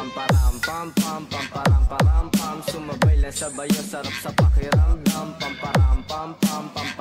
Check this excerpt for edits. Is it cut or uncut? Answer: uncut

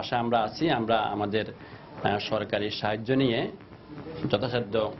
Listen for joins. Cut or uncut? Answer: uncut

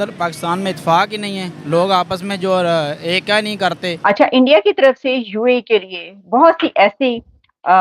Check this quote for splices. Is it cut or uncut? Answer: cut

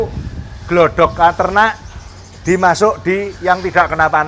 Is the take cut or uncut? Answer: uncut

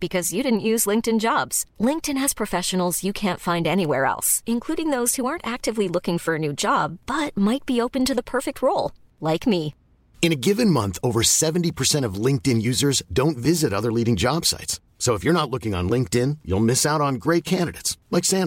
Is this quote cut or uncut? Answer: uncut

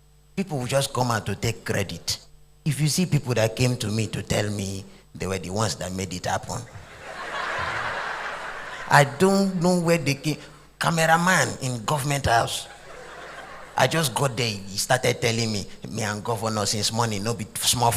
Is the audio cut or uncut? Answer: cut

